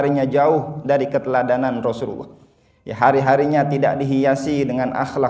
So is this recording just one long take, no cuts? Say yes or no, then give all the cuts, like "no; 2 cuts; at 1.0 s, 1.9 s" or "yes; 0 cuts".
yes; 0 cuts